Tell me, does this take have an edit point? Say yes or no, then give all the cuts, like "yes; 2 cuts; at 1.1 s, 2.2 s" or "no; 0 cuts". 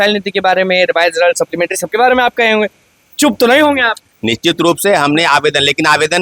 no; 0 cuts